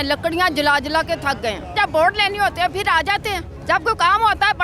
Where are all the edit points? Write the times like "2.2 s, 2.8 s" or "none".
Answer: 1.7 s, 3.5 s